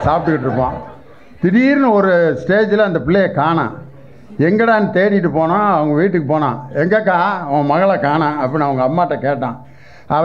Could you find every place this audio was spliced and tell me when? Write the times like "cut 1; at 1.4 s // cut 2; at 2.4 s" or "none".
none

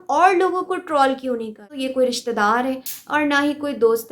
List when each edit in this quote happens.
cut 1; at 1.7 s

